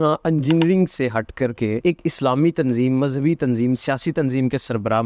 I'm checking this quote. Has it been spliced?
yes; 1 cut; at 1.8 s

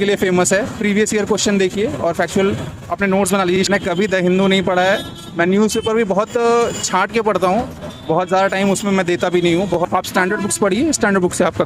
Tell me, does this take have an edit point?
yes; 2 cuts; at 3.7 s, 9.7 s

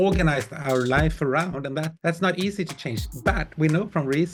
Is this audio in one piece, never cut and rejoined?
yes; 0 cuts

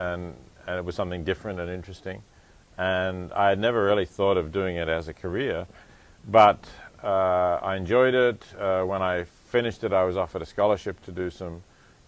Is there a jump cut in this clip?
no; 0 cuts

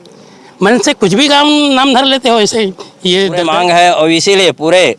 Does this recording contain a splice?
yes; 1 cut; at 3.5 s

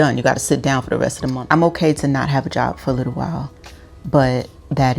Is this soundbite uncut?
no; 1 cut; at 1.3 s

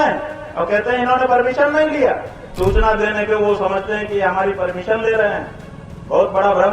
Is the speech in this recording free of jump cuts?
no; 1 cut; at 2.5 s

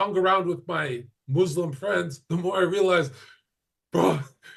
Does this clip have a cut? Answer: no; 0 cuts

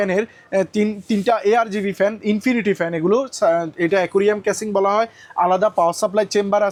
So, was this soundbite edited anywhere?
no; 0 cuts

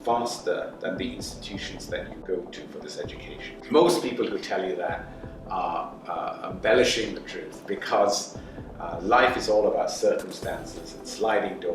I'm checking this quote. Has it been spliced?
yes; 2 cuts; at 2.1 s, 3.6 s

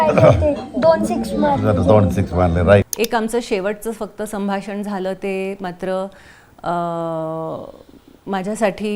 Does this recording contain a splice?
yes; 1 cut; at 2.9 s

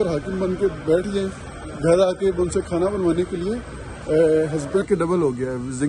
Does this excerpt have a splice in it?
yes; 1 cut; at 4.8 s

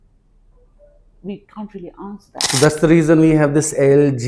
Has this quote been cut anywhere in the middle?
yes; 1 cut; at 2.5 s

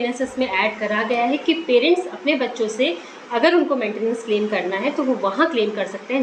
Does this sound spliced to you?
no; 0 cuts

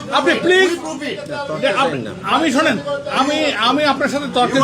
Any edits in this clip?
no; 0 cuts

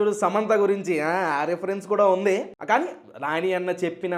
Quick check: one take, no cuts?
yes; 0 cuts

